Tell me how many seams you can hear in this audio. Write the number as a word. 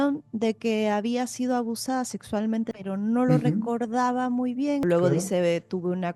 two